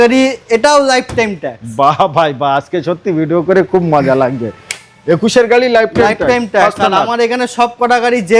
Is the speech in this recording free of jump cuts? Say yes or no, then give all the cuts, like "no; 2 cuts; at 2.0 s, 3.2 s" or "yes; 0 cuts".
yes; 0 cuts